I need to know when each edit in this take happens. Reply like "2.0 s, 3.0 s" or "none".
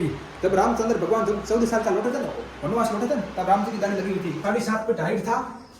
4.4 s

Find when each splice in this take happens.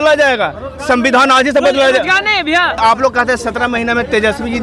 2.8 s

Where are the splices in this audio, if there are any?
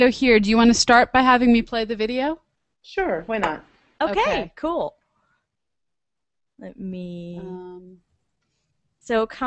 2.8 s

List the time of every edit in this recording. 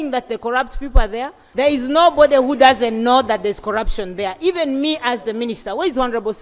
1.4 s

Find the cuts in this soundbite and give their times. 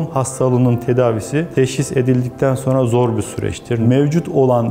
3.8 s

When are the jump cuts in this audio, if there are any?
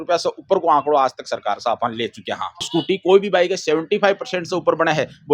2.6 s

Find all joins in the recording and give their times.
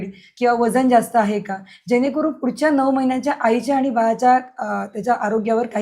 none

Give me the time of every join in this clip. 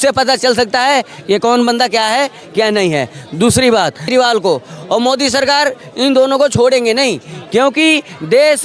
4.1 s

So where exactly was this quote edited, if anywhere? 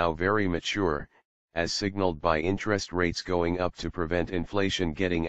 4.3 s

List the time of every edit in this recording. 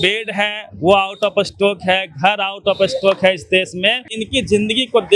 4.1 s

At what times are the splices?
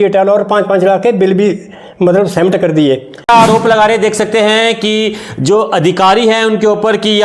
3.3 s

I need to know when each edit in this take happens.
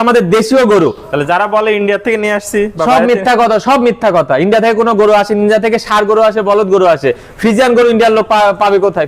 none

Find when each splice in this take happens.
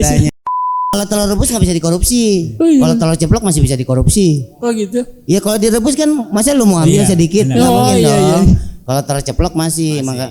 1.0 s

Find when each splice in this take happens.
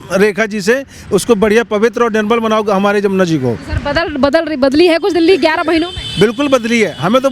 none

